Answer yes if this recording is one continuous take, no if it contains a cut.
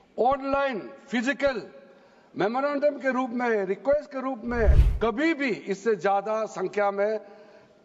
no